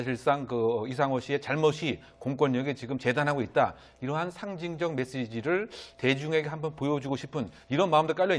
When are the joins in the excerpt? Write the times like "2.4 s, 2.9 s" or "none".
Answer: 3.6 s